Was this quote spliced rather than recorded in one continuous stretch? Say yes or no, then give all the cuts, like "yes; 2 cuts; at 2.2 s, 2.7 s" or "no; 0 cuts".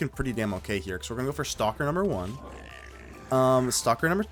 no; 0 cuts